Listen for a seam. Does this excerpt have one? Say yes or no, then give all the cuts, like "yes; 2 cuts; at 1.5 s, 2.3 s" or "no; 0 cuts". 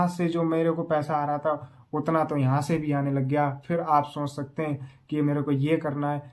no; 0 cuts